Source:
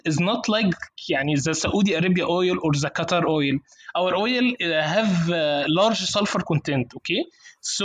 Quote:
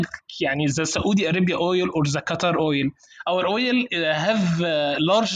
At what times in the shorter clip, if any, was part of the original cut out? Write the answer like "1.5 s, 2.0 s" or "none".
none

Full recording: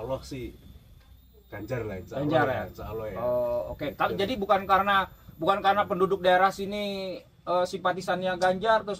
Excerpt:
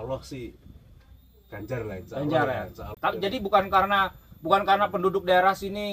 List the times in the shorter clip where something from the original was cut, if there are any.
3.0 s

